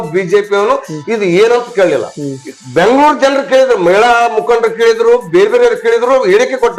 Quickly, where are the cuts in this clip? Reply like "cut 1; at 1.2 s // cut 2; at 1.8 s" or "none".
none